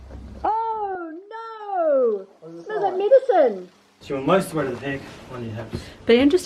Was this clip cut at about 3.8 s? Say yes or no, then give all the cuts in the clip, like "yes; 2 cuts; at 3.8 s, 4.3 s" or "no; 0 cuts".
yes; 1 cut; at 3.8 s